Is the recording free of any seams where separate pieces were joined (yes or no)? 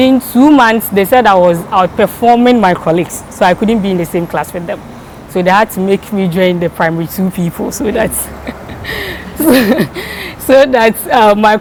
yes